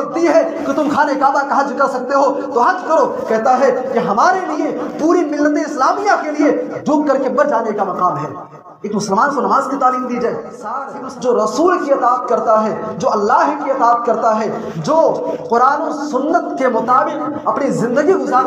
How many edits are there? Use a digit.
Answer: 1